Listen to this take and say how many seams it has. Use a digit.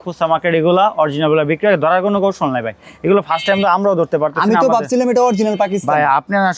0